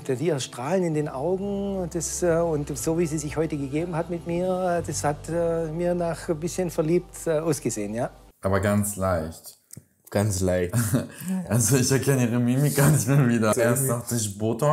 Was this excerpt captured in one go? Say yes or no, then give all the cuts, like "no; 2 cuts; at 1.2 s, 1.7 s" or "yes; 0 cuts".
no; 1 cut; at 13.5 s